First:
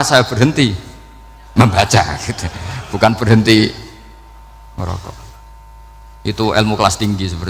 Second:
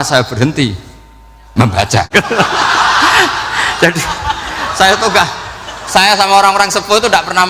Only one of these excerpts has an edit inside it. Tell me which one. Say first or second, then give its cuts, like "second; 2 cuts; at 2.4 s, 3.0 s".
second; 1 cut; at 2.1 s